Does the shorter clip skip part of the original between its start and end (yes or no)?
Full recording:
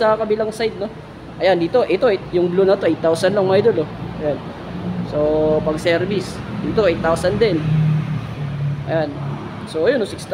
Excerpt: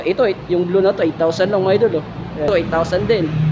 yes